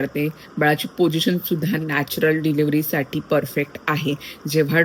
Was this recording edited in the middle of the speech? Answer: no; 0 cuts

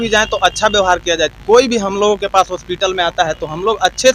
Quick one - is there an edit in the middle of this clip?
no; 0 cuts

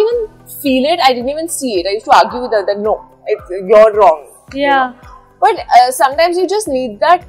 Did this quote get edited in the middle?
no; 0 cuts

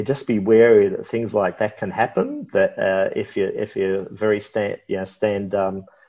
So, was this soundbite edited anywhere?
no; 0 cuts

